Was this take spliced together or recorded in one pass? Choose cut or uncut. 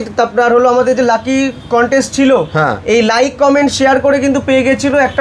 uncut